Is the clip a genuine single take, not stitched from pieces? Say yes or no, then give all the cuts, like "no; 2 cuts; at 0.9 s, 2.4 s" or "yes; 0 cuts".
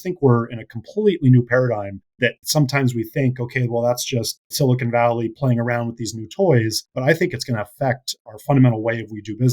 no; 1 cut; at 6.8 s